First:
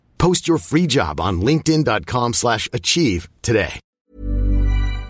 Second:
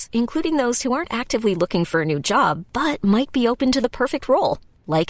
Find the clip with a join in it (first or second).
first